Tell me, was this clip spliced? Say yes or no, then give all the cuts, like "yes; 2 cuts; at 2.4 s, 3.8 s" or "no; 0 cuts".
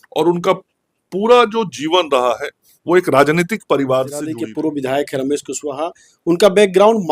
yes; 1 cut; at 4.4 s